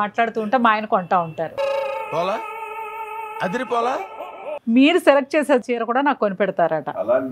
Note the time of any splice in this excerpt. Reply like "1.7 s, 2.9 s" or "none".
4.5 s, 5.6 s